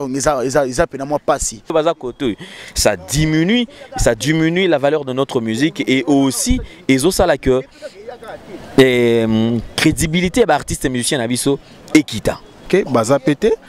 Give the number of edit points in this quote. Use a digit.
2